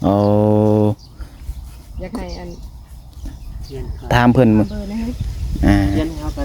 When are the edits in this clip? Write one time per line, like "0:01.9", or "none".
0:04.1